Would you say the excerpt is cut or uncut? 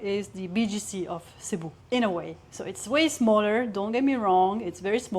cut